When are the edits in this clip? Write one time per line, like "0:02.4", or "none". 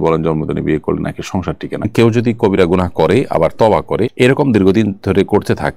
0:01.9